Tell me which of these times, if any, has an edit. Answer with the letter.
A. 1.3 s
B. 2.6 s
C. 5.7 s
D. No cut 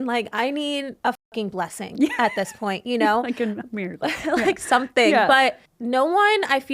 C